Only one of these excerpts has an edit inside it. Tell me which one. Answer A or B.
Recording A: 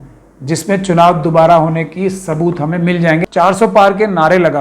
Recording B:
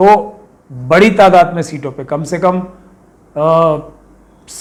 A